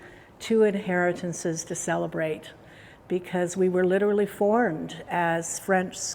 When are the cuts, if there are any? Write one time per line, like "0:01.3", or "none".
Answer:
none